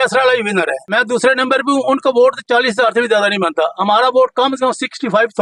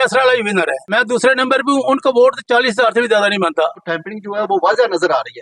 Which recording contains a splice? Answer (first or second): second